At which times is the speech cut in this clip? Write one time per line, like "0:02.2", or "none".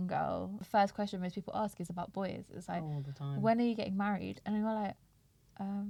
none